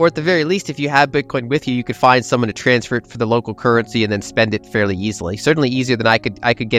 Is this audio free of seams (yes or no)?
yes